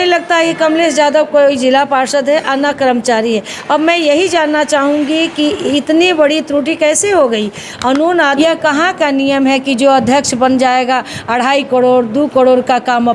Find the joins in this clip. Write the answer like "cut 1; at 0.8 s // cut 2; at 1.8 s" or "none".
cut 1; at 8.3 s